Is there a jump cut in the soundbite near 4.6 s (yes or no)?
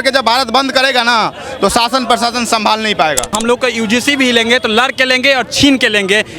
no